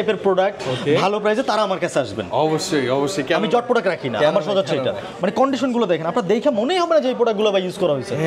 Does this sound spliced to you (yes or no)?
no